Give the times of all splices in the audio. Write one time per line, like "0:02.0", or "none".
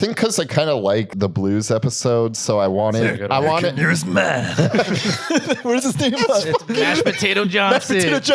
0:01.1